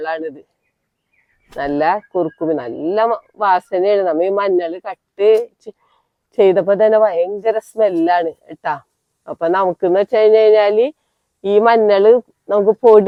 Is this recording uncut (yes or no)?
yes